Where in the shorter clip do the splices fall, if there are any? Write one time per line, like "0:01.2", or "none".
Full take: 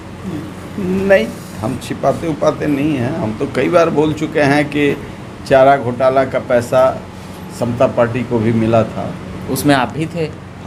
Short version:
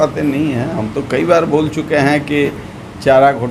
none